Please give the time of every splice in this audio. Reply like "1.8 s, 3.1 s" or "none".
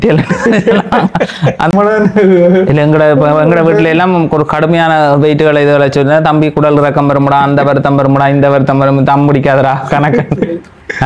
1.7 s